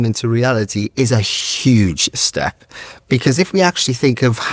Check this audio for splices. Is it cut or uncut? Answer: uncut